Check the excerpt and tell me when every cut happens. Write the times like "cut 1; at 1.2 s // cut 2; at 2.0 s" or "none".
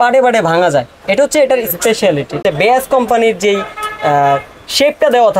cut 1; at 2.4 s

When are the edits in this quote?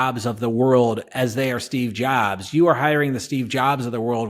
cut 1; at 1.1 s

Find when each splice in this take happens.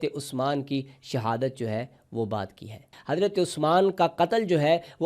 cut 1; at 2.9 s

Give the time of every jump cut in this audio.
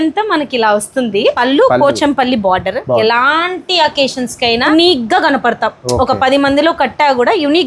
cut 1; at 1.4 s // cut 2; at 3.0 s // cut 3; at 4.7 s

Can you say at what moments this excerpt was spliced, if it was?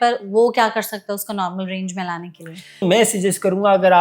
cut 1; at 2.8 s

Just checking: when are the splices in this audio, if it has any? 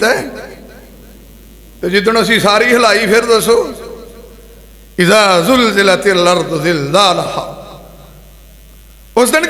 none

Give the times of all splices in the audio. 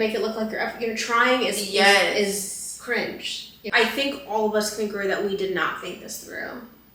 cut 1; at 3.7 s

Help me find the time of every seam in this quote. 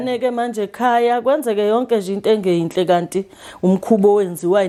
none

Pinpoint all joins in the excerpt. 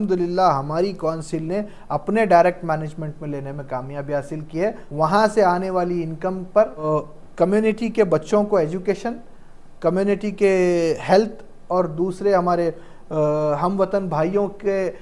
cut 1; at 4.8 s // cut 2; at 6.8 s

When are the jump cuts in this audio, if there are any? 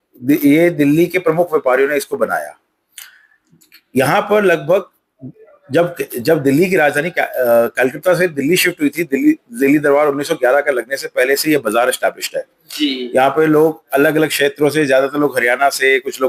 none

